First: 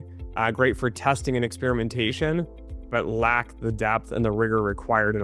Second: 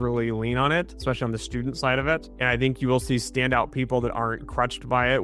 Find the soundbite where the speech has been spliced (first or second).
second